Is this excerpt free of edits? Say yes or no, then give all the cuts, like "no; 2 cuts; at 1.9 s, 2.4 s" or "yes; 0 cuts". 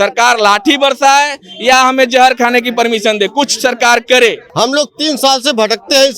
no; 1 cut; at 4.4 s